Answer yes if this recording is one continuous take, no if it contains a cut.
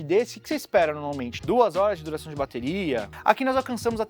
no